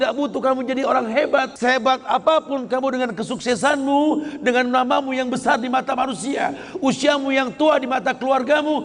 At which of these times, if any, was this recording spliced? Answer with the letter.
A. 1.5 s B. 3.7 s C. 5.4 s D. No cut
A